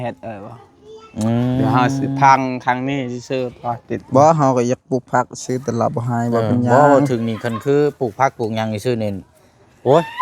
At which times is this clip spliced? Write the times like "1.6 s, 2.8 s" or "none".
3.9 s